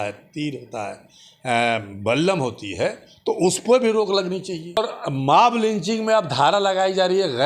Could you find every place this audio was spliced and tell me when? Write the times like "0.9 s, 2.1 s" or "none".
4.8 s